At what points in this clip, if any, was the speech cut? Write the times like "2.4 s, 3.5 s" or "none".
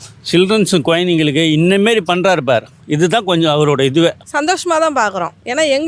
4.2 s